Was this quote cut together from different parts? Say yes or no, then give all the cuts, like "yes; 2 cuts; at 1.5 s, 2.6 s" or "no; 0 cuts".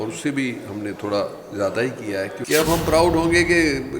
yes; 1 cut; at 2.4 s